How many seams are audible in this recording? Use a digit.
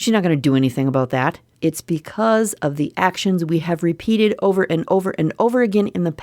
1